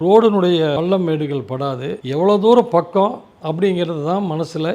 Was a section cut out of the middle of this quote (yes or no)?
yes